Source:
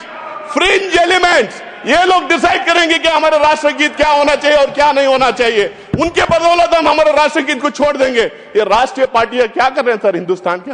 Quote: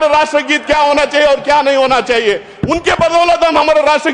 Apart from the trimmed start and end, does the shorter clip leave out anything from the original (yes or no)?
no